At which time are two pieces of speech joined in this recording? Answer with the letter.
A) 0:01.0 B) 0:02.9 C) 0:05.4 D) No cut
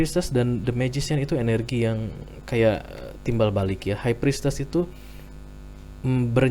D